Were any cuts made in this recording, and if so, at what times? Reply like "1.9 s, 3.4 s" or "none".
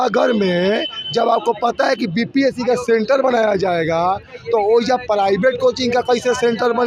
none